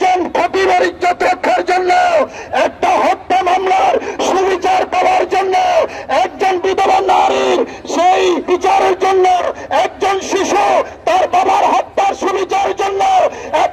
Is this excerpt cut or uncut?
cut